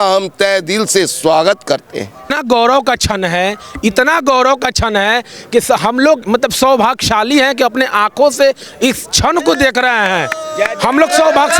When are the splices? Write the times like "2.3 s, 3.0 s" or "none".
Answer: 2.4 s